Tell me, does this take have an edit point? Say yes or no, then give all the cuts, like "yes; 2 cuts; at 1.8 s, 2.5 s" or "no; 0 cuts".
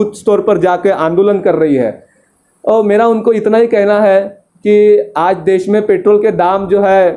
no; 0 cuts